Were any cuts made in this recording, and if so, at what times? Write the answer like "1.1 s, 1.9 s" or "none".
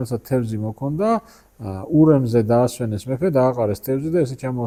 none

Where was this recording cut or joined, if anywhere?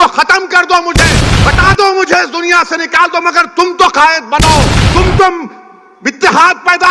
1.2 s, 4.8 s

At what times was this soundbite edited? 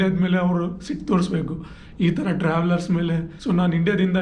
3.3 s

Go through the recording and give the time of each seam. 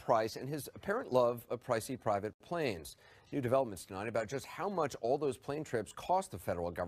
none

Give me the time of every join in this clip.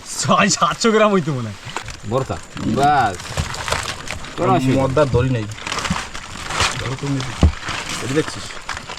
1.9 s

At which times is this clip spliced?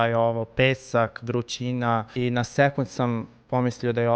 2.1 s

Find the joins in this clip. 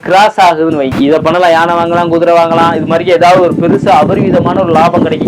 0.9 s

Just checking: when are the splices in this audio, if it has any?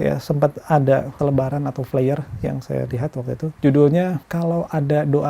1.1 s, 3.5 s, 4.2 s

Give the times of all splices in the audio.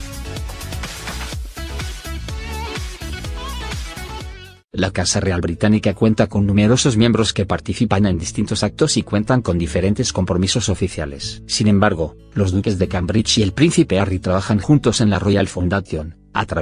none

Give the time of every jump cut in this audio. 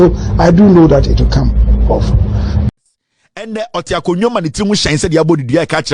2.7 s

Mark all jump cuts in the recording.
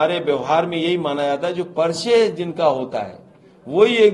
none

